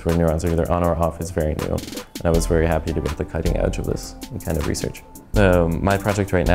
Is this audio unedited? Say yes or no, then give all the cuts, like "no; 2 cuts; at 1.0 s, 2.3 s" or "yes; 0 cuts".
no; 1 cut; at 5.2 s